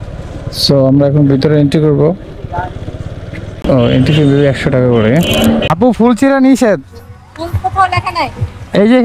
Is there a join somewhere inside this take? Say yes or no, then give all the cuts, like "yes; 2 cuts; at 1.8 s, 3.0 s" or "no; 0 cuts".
yes; 2 cuts; at 3.6 s, 5.7 s